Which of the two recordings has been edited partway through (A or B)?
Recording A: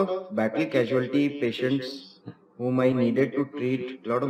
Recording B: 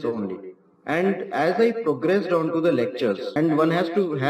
B